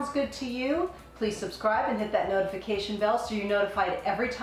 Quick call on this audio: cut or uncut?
uncut